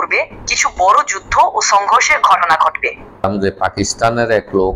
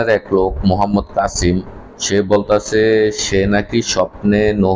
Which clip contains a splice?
first; 1 cut; at 3.2 s

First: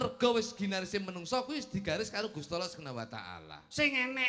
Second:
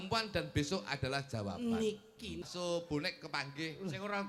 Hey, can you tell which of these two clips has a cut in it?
second; 1 cut; at 2.5 s

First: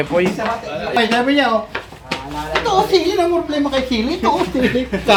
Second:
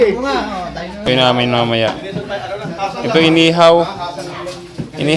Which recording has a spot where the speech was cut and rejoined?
second; 1 cut; at 1.1 s

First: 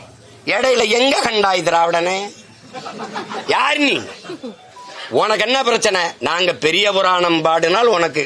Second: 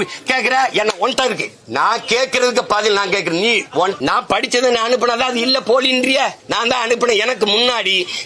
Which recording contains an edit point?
second; 3 cuts; at 1.5 s, 4.0 s, 6.4 s

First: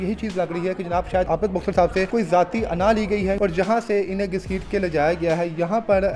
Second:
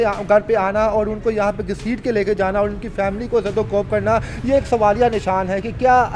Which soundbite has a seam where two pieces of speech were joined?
first; 3 cuts; at 1.3 s, 2.1 s, 3.4 s

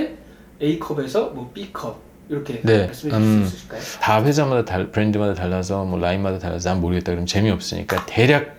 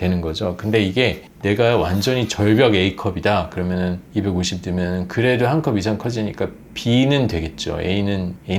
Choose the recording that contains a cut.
first; 2 cuts; at 2.9 s, 3.9 s

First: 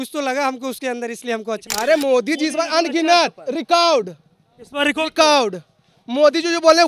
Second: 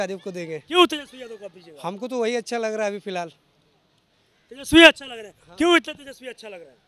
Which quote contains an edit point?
first; 1 cut; at 1.6 s

